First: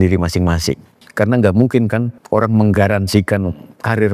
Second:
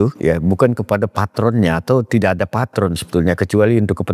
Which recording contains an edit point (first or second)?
first